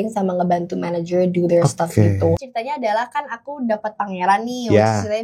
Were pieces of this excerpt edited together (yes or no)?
yes